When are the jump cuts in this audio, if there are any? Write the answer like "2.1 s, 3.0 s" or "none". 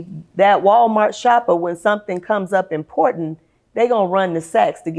none